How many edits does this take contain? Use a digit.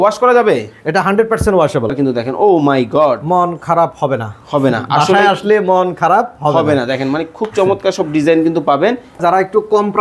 2